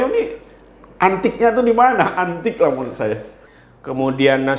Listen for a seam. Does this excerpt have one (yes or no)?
yes